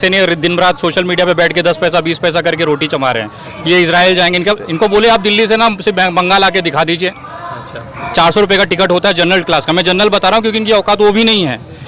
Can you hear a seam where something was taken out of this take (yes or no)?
no